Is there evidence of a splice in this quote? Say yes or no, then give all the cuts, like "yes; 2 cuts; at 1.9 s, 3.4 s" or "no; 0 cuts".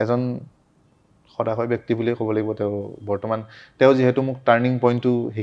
no; 0 cuts